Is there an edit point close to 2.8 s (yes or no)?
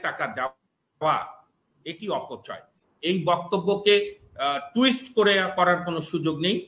yes